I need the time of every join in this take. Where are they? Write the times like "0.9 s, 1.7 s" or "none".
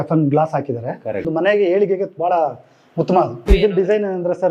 1.3 s, 3.5 s